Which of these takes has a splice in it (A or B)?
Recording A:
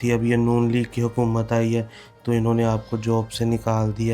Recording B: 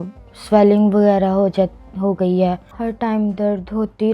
B